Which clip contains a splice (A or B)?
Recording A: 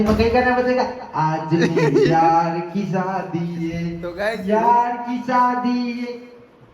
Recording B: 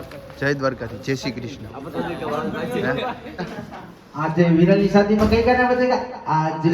B